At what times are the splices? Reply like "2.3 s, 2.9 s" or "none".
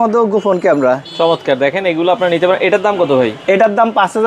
none